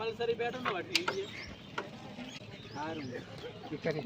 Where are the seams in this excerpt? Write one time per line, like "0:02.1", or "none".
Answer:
0:02.4